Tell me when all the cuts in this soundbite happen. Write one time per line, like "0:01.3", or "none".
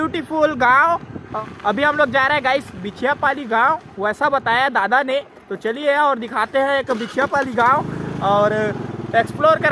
none